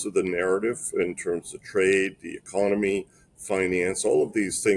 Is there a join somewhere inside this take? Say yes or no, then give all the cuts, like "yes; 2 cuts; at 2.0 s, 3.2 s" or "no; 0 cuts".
no; 0 cuts